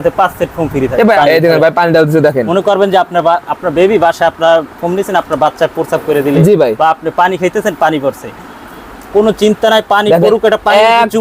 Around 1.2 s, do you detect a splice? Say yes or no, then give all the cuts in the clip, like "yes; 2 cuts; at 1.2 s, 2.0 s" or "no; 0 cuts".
yes; 1 cut; at 1.2 s